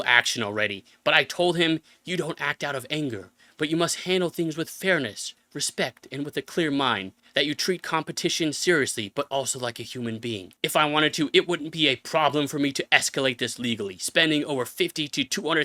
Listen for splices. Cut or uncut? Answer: uncut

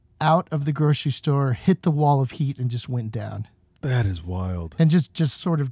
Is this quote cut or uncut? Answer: uncut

